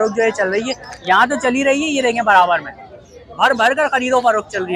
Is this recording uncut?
yes; 0 cuts

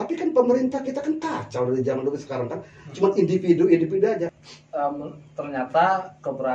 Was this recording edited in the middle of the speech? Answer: yes; 1 cut; at 4.3 s

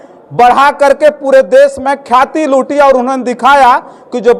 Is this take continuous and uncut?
yes; 0 cuts

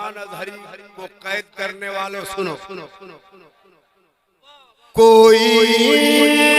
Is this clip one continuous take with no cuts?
no; 1 cut; at 4.8 s

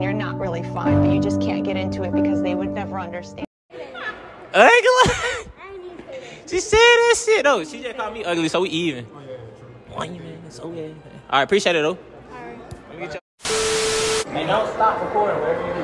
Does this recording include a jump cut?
no; 0 cuts

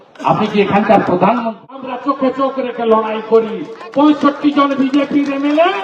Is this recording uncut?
no; 1 cut; at 1.9 s

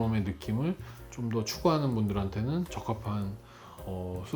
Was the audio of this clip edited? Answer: no; 0 cuts

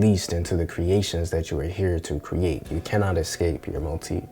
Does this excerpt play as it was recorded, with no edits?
yes; 0 cuts

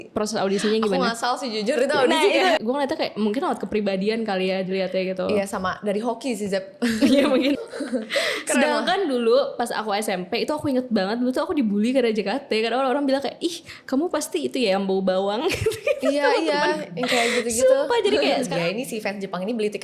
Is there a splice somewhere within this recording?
yes; 3 cuts; at 2.6 s, 7.5 s, 18.5 s

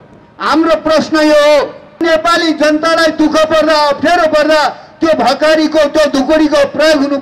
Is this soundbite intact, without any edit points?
no; 1 cut; at 2.0 s

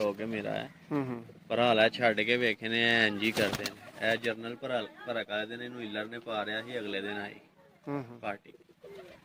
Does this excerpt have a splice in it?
no; 0 cuts

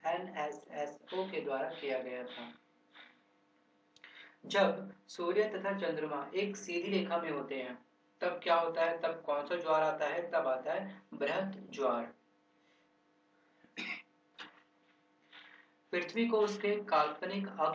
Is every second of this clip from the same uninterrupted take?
yes; 0 cuts

